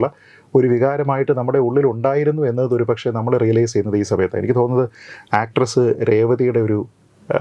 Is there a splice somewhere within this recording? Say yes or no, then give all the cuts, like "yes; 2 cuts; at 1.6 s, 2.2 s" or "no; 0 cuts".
no; 0 cuts